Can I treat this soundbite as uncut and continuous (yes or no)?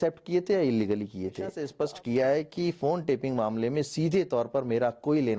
no